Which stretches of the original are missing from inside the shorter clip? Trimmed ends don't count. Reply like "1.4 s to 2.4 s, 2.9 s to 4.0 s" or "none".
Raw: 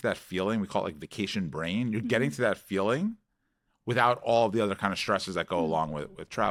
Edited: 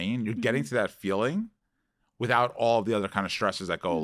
none